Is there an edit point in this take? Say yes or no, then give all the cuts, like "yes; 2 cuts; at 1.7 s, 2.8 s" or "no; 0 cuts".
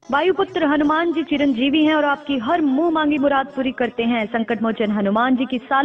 no; 0 cuts